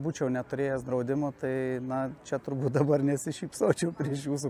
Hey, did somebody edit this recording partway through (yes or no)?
no